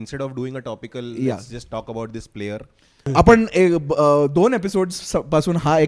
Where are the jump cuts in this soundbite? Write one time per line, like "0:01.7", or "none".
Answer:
0:03.1